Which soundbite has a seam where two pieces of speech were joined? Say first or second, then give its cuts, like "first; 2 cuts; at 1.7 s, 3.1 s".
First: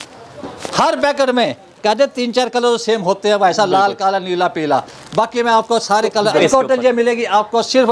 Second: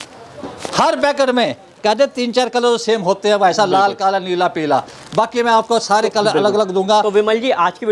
first; 1 cut; at 6.4 s